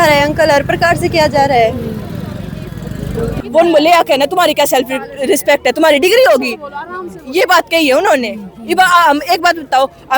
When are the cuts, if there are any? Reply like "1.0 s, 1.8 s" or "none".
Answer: 3.4 s